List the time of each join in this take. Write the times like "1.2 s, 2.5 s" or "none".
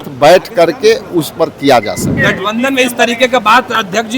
2.1 s

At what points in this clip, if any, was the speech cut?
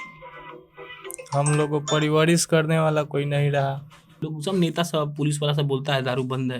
4.3 s

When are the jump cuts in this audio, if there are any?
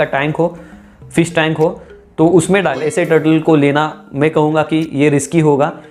2.8 s

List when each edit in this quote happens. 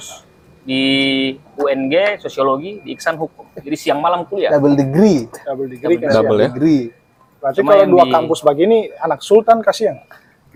none

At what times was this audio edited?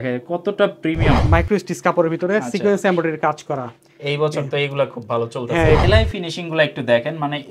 1.2 s, 5.8 s

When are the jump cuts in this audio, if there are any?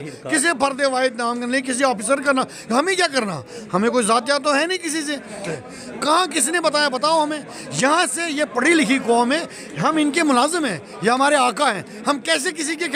5.5 s

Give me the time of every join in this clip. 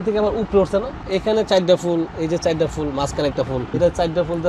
1.0 s, 3.7 s

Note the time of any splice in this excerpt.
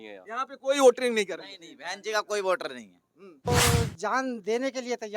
3.5 s

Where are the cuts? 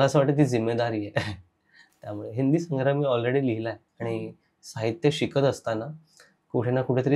none

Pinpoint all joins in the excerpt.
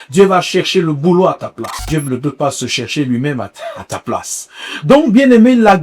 1.8 s

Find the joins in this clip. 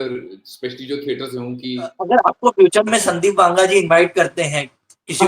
2.0 s

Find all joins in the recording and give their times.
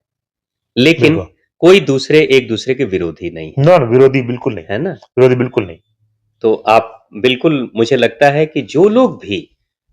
none

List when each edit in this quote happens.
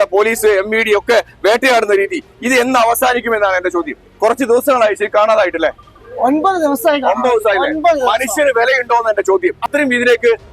4.1 s, 9.6 s

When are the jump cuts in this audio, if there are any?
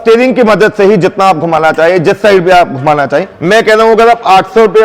3.3 s

